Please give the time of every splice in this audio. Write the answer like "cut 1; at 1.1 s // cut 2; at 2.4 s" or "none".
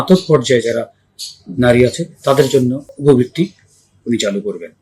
cut 1; at 2.9 s